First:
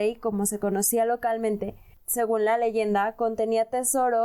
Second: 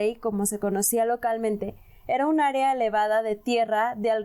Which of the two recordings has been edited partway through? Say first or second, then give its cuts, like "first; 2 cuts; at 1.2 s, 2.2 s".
first; 1 cut; at 2.0 s